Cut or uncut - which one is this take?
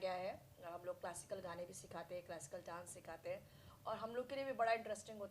uncut